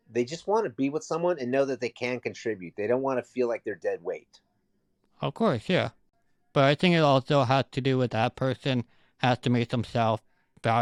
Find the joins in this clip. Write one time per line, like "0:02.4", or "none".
none